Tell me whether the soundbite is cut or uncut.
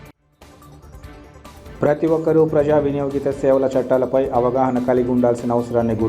uncut